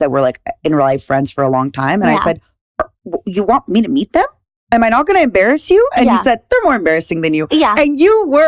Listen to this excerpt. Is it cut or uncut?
uncut